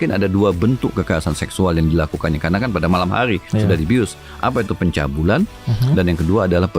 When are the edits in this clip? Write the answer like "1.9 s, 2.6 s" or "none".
none